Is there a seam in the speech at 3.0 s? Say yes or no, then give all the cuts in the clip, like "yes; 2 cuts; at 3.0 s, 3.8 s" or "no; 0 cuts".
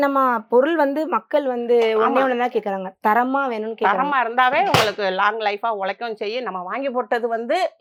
no; 0 cuts